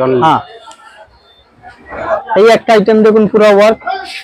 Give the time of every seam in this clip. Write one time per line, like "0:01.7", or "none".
0:02.0